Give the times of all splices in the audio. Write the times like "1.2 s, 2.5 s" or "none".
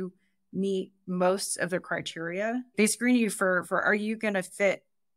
1.0 s

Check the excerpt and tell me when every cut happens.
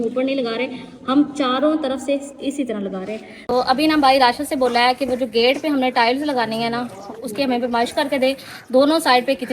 3.3 s

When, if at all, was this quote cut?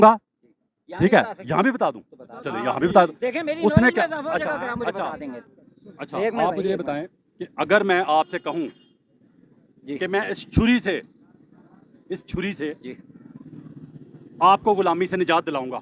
none

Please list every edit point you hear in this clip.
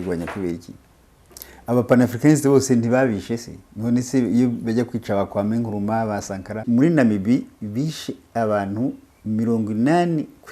6.6 s

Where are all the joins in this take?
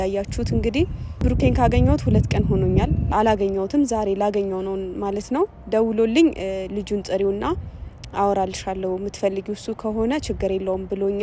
1.2 s, 3.1 s

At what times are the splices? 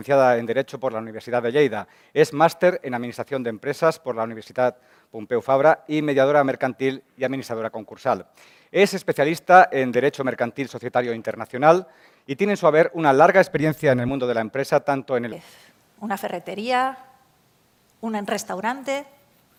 none

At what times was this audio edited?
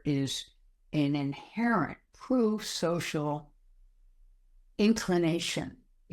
4.7 s

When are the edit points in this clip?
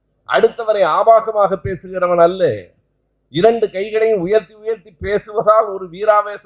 none

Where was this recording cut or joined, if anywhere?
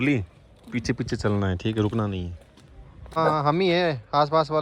3.2 s

